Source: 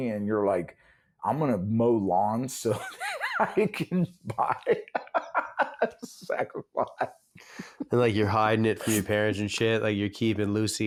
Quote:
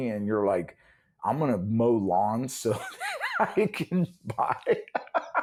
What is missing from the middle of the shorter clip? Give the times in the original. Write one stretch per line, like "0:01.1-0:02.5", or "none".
none

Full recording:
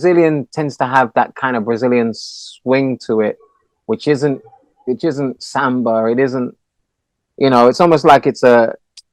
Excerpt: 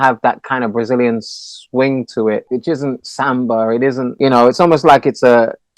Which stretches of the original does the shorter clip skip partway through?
0:03.4-0:04.8
0:06.5-0:07.3

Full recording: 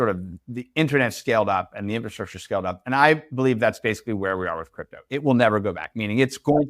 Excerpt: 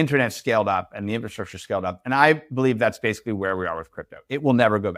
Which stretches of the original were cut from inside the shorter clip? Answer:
none

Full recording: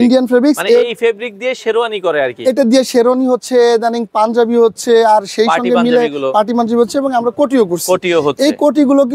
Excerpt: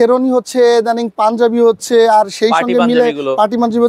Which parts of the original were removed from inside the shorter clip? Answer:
none

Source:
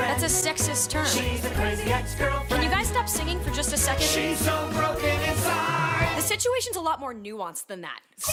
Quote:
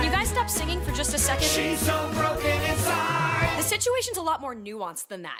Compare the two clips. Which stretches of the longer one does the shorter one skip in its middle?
none

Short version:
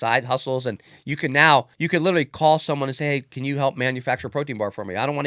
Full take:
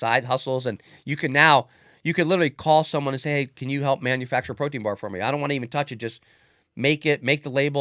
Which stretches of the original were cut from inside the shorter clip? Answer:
0:01.8-0:02.0

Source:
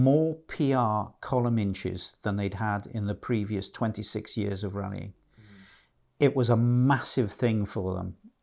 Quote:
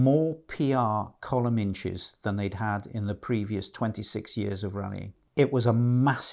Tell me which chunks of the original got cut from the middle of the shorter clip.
0:05.2-0:06.0

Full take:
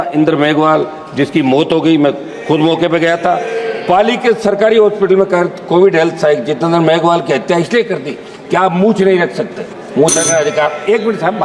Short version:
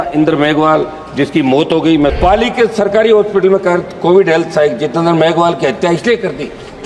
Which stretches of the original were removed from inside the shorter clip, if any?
0:02.2-0:03.8

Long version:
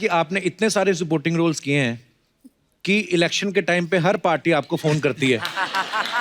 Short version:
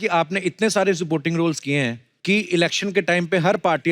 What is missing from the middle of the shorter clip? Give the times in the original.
0:02.1-0:02.7

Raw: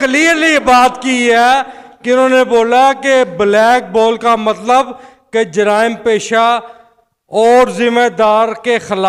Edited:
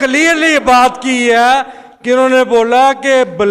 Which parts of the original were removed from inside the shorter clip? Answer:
none

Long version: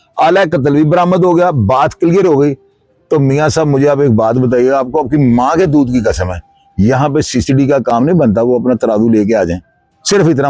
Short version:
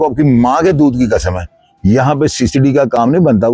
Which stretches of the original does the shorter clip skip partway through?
none

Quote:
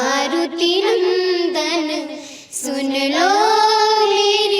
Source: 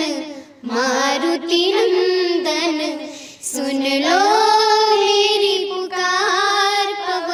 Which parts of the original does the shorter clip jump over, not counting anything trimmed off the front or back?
none

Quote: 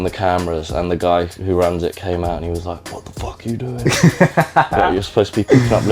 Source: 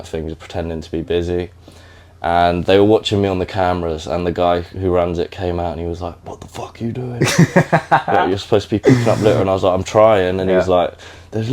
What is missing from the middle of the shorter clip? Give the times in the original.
none

